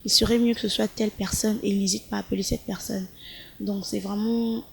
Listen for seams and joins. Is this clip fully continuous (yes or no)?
yes